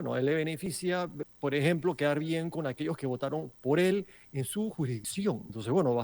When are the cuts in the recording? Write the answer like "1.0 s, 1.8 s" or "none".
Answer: 1.1 s, 5.0 s